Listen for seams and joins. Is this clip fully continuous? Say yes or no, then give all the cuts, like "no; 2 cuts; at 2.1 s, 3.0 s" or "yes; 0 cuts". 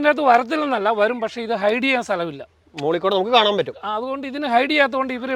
yes; 0 cuts